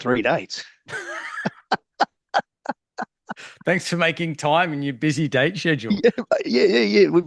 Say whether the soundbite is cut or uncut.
uncut